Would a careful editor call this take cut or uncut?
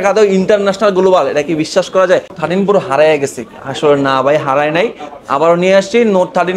cut